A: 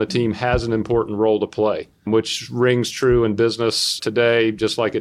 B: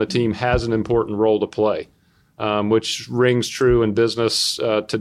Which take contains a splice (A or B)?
A